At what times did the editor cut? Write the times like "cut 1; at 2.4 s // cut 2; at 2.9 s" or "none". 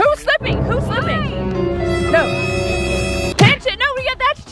none